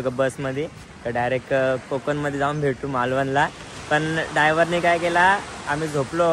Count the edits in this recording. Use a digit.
0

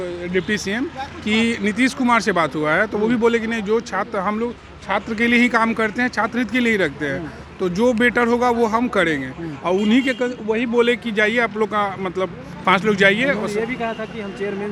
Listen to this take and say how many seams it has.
0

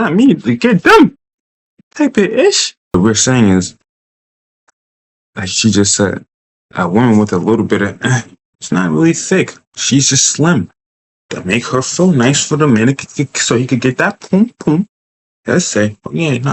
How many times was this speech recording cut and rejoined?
1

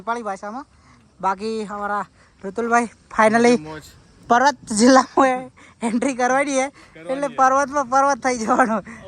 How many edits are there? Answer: 0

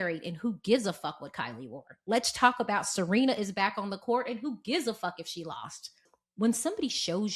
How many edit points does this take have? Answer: 1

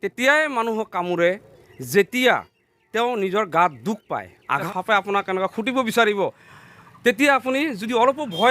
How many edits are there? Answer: 1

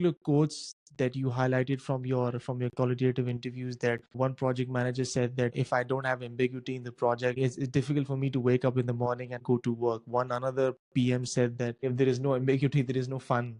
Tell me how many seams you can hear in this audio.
0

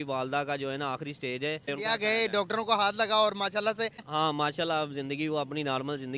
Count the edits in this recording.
2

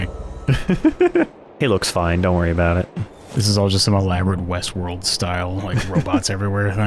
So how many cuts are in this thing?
1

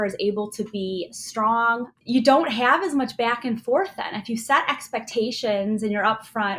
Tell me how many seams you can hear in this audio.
1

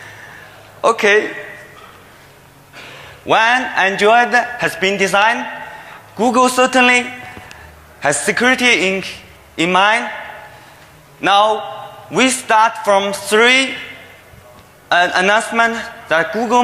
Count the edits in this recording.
1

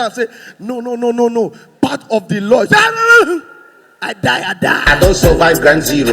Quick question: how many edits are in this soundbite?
1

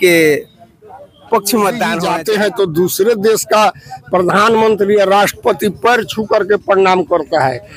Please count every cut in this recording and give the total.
1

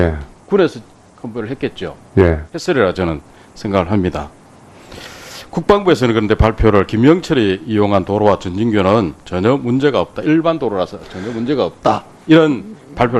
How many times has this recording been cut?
1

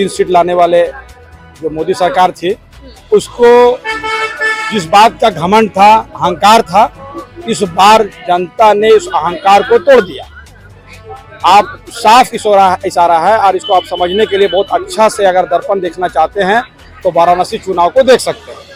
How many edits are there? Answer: 0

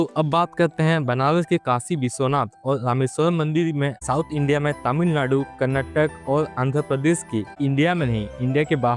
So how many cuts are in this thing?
2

